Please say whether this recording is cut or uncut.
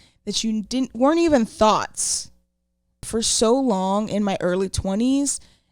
cut